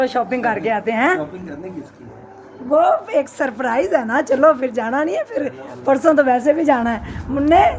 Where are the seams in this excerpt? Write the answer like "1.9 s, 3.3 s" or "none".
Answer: none